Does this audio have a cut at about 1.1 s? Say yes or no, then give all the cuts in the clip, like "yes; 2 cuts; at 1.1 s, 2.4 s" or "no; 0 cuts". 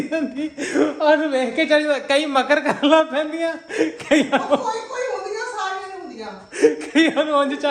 no; 0 cuts